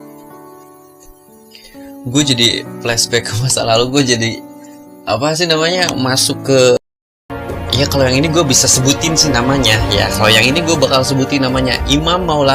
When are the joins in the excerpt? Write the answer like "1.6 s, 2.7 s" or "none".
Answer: 6.8 s